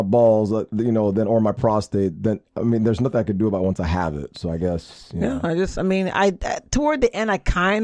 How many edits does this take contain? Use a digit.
0